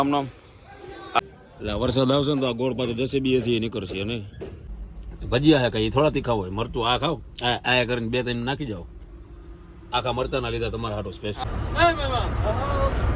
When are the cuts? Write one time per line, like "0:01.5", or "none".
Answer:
0:01.2
0:04.7
0:11.4